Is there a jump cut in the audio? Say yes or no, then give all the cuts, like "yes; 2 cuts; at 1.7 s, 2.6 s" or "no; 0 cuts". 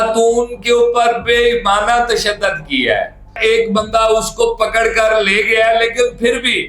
yes; 1 cut; at 3.4 s